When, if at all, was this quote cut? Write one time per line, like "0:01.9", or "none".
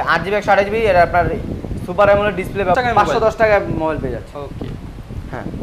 0:02.8